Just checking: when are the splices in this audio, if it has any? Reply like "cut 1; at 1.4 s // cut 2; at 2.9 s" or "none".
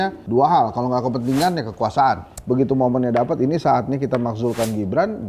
cut 1; at 2.3 s